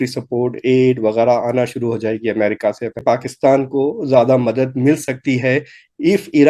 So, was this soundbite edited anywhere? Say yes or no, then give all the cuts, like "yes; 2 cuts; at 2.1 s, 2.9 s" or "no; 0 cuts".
yes; 1 cut; at 3.0 s